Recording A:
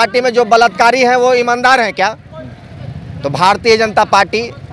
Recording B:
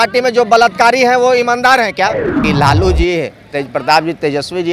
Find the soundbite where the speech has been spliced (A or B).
B